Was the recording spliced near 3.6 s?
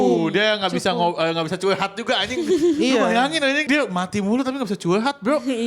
yes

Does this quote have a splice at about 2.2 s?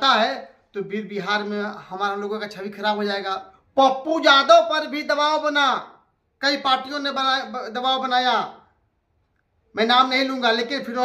no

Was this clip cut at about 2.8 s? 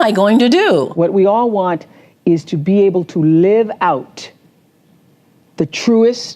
no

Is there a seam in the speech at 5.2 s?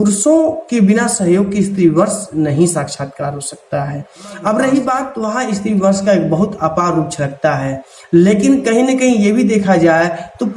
yes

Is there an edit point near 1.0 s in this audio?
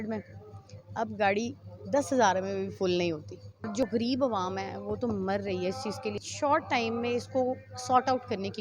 no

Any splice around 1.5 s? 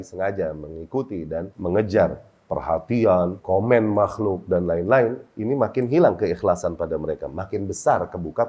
yes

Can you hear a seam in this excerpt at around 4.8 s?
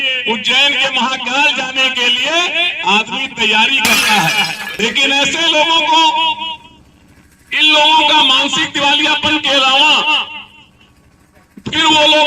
yes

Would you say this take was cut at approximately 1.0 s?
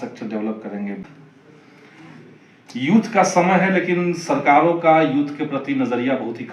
yes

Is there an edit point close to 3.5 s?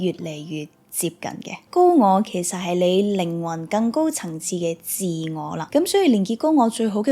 no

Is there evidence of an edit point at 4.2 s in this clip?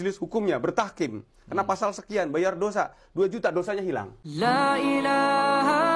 yes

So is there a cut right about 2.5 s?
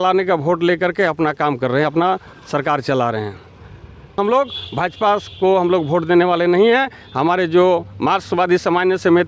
no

